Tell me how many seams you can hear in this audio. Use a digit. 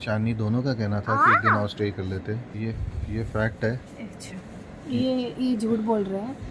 1